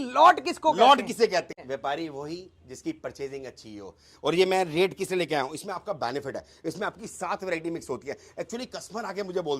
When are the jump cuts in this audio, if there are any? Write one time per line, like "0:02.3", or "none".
0:01.6